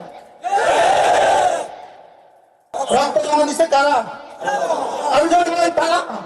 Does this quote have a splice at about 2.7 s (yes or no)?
yes